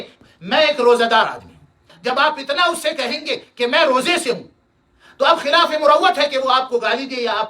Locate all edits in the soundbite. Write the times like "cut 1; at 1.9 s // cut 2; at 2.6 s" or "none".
cut 1; at 1.9 s